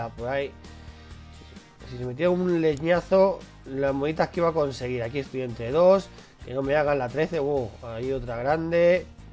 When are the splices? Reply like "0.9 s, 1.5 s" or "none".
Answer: none